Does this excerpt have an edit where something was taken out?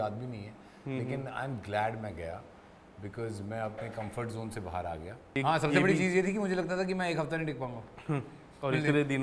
yes; 1 cut; at 5.2 s

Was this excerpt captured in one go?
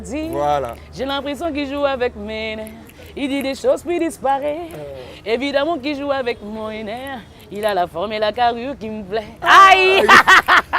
yes; 0 cuts

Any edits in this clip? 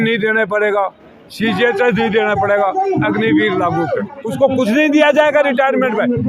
yes; 1 cut; at 4.2 s

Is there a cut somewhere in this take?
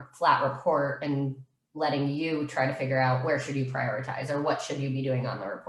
no; 0 cuts

